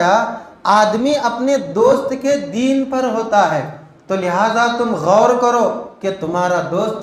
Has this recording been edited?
no; 0 cuts

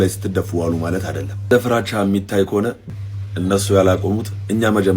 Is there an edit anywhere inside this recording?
yes; 2 cuts; at 1.5 s, 2.8 s

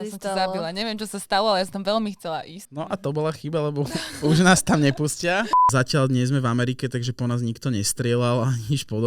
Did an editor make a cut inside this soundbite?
yes; 2 cuts; at 2.6 s, 5.7 s

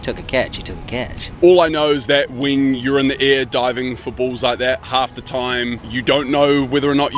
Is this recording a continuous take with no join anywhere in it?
no; 3 cuts; at 1.2 s, 4.8 s, 5.9 s

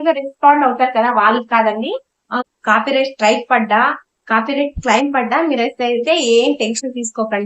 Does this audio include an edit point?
yes; 1 cut; at 2.4 s

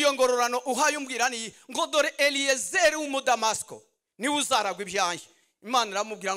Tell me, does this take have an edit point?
no; 0 cuts

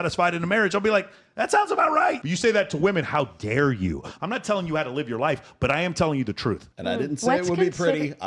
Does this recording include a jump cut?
yes; 2 cuts; at 2.2 s, 4.1 s

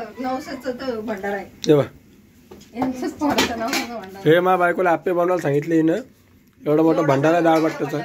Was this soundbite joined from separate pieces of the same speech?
no; 0 cuts

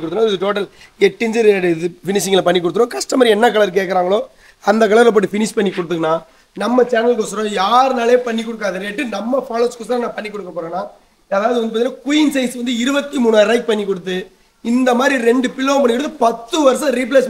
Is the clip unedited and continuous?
yes; 0 cuts

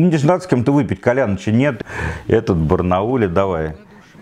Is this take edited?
yes; 1 cut; at 1.8 s

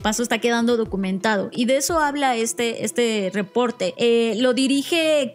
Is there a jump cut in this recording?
yes; 1 cut; at 3.9 s

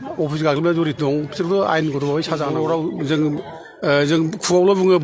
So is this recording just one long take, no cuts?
no; 1 cut; at 2.5 s

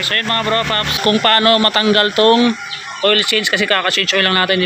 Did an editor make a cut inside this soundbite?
yes; 1 cut; at 1.0 s

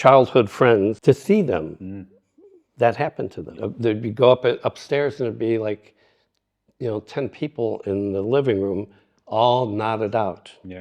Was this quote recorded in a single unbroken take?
no; 2 cuts; at 1.0 s, 3.6 s

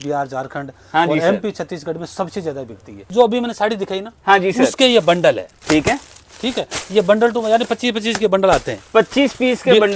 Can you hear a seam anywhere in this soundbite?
yes; 1 cut; at 3.0 s

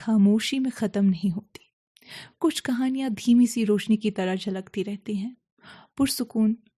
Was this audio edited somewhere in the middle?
no; 0 cuts

